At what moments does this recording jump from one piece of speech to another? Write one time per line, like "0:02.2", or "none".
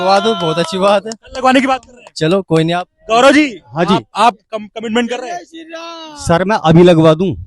none